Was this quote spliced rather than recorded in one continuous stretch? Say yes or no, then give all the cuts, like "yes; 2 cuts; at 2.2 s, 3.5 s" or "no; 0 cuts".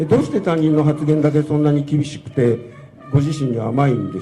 no; 0 cuts